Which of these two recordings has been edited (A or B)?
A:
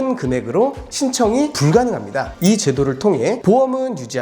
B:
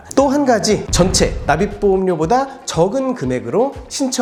A